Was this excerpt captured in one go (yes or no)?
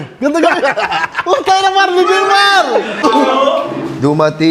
no